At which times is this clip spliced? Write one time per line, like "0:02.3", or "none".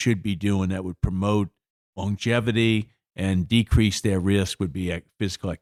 none